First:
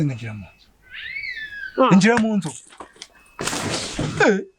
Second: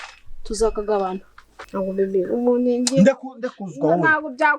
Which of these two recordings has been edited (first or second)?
second